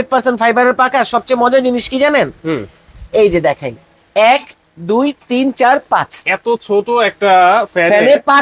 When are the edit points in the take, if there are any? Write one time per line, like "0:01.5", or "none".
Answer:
none